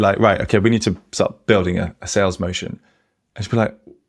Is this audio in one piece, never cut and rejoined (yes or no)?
yes